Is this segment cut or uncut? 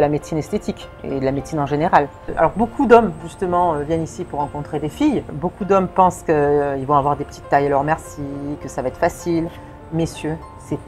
cut